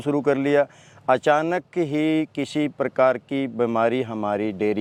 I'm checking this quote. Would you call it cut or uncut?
uncut